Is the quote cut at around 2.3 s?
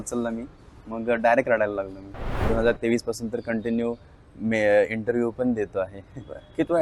yes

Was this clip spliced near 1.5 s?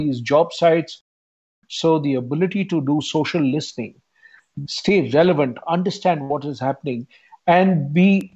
yes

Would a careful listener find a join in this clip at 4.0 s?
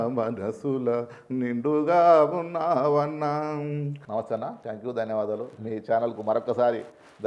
yes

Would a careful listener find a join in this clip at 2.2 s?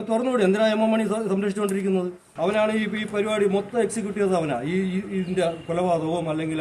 yes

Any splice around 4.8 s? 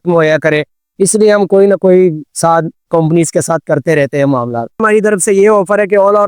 yes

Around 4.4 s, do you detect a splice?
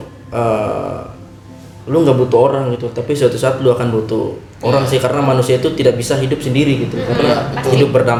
no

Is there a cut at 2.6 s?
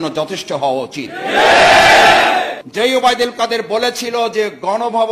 yes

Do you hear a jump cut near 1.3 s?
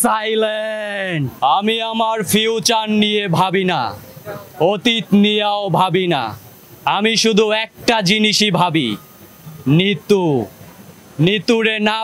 yes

